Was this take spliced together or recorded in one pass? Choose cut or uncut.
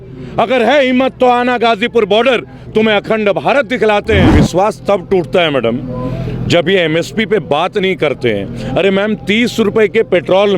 cut